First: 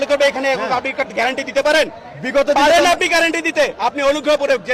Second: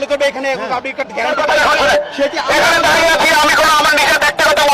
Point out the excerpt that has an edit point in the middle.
second; 1 cut; at 1.2 s

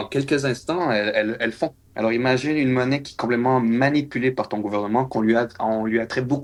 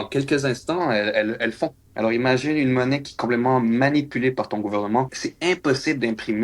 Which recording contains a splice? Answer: second; 1 cut; at 5.1 s

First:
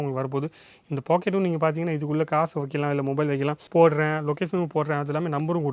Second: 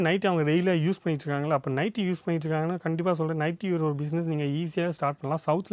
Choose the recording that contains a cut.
first; 1 cut; at 3.6 s

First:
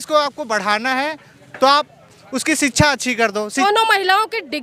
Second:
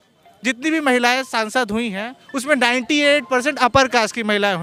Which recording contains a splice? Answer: first; 1 cut; at 3.6 s

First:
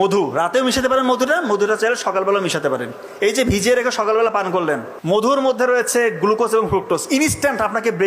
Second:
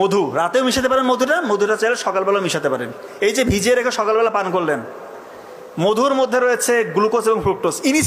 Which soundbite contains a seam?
first; 1 cut; at 5.3 s

